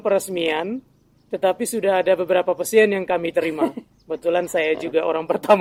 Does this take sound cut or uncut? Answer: uncut